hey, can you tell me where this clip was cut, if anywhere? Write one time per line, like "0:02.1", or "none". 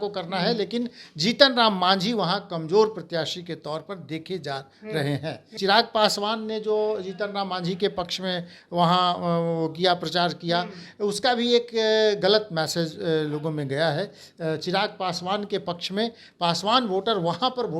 0:05.5